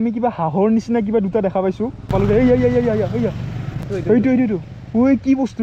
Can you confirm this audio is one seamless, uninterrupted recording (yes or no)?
no